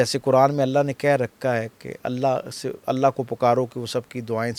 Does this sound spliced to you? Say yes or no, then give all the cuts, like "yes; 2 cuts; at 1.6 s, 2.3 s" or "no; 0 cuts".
no; 0 cuts